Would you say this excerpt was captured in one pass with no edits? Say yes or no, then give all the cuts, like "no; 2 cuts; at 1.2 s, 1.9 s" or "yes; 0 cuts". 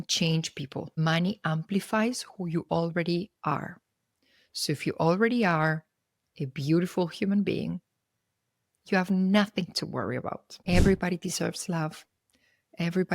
no; 1 cut; at 10.5 s